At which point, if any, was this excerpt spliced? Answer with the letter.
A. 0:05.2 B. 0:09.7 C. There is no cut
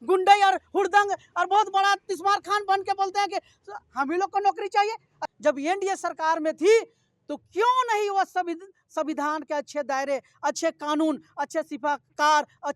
A